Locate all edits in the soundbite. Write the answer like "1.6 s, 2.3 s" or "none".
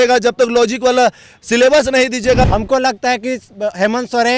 2.5 s